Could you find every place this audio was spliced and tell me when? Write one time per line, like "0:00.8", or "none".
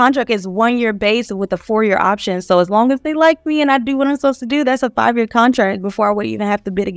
none